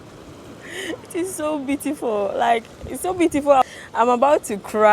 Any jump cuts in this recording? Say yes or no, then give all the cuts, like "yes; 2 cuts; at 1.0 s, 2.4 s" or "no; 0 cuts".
yes; 1 cut; at 3.8 s